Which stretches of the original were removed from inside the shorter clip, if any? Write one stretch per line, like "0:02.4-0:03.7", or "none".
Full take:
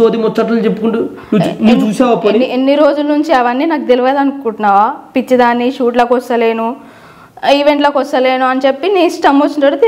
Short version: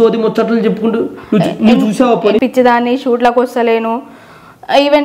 0:02.4-0:05.1